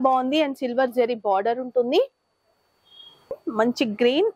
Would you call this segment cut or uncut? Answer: cut